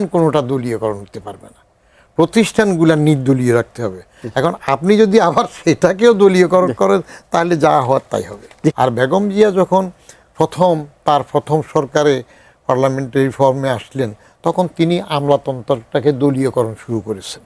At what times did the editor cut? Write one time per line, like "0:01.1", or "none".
0:08.8